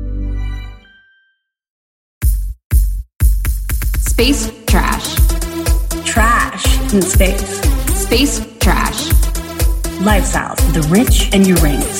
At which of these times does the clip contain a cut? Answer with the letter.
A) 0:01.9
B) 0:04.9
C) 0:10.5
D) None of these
A